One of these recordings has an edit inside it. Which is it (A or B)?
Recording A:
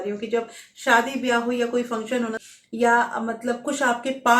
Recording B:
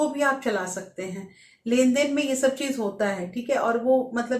A